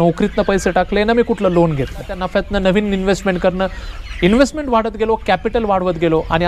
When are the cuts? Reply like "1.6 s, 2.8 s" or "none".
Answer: 2.2 s